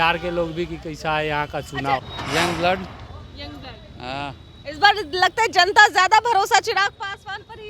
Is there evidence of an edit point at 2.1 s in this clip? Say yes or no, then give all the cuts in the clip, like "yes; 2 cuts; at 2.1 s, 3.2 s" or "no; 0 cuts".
yes; 1 cut; at 2.1 s